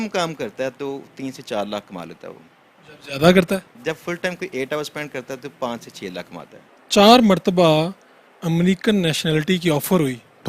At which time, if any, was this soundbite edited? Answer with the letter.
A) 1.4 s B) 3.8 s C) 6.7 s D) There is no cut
C